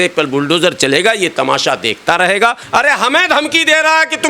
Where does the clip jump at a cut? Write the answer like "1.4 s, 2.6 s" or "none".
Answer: 2.6 s